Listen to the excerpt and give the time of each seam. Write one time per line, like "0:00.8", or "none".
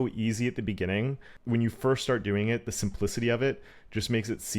0:01.3